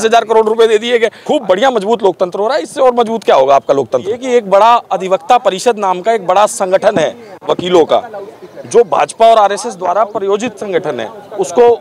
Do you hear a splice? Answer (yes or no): yes